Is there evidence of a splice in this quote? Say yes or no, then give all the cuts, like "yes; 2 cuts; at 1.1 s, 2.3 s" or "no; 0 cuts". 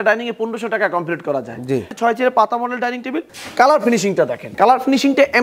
yes; 3 cuts; at 1.9 s, 3.3 s, 4.4 s